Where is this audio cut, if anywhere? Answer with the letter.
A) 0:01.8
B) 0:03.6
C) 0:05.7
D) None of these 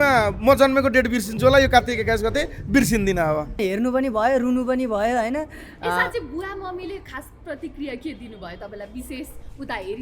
B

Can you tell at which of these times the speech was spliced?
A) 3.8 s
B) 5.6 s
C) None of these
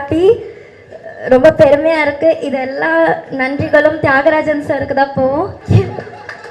B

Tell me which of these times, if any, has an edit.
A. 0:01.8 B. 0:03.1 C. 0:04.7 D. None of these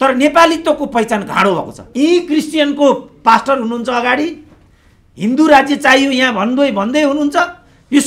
A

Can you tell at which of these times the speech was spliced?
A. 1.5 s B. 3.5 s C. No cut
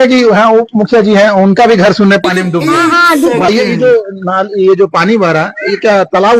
B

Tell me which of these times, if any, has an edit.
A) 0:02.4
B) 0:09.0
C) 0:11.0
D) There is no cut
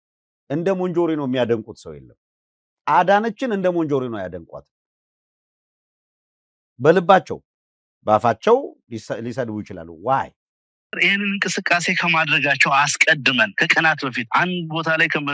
C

